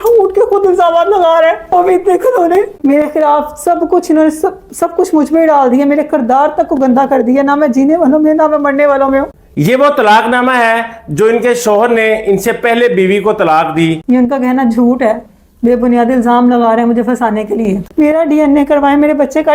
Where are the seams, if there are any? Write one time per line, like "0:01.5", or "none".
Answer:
0:02.8
0:09.4
0:14.0
0:17.8